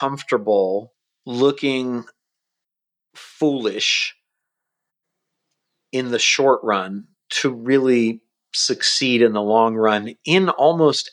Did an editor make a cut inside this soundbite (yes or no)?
no